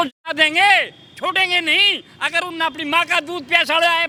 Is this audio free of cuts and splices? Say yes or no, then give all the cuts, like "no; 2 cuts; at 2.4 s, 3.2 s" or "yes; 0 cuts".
yes; 0 cuts